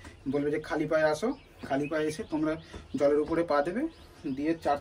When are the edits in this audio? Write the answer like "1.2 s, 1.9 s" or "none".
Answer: none